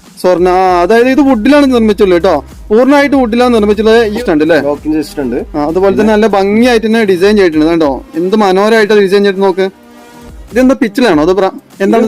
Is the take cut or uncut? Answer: cut